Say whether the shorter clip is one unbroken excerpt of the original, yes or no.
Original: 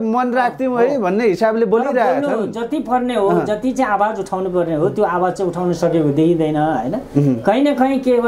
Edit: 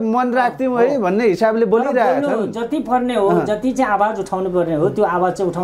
yes